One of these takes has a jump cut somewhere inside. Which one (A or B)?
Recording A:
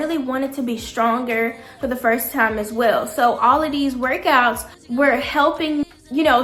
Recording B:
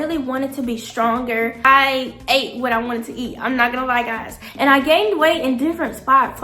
B